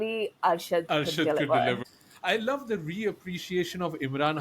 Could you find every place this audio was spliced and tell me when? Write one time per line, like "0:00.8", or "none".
0:01.8